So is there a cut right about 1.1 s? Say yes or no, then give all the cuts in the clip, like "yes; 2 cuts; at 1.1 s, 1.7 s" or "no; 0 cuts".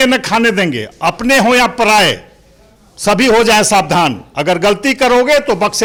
no; 0 cuts